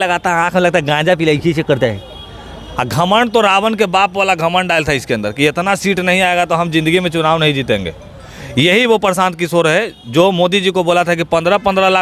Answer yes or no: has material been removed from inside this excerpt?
no